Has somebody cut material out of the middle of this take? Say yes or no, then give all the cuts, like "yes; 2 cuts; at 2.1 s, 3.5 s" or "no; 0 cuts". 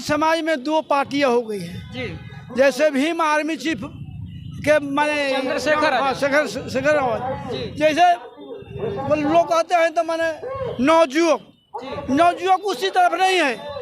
no; 0 cuts